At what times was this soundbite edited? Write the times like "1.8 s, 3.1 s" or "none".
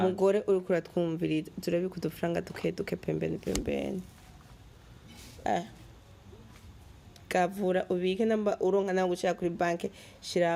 none

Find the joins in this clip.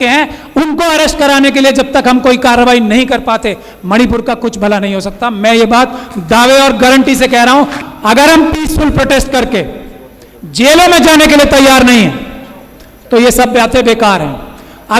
7.8 s

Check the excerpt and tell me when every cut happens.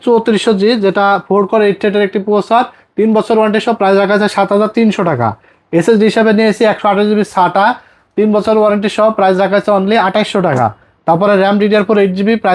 none

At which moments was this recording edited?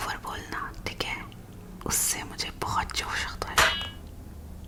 none

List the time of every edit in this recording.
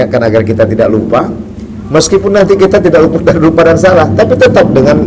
none

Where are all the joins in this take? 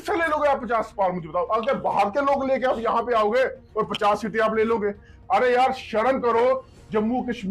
none

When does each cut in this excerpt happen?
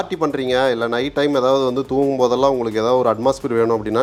none

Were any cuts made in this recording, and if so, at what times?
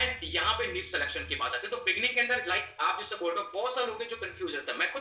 none

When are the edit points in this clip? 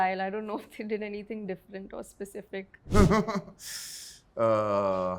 2.9 s

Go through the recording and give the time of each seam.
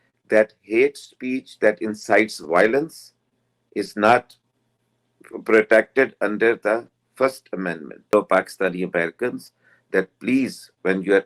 8.1 s

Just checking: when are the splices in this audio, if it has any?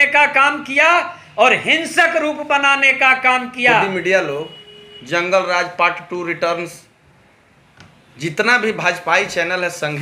3.9 s

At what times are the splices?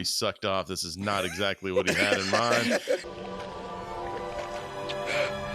3.1 s

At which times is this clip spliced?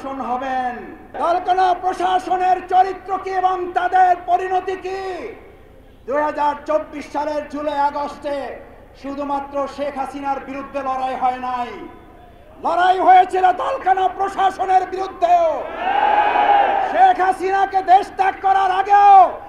1.1 s

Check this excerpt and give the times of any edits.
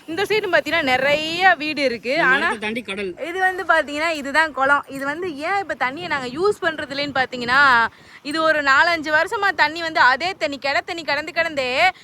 3.2 s

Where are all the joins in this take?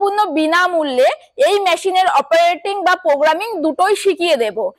none

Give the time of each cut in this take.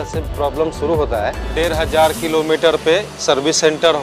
1.4 s

